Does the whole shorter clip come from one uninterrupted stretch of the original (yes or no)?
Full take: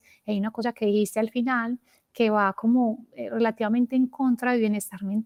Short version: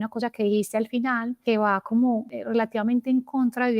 no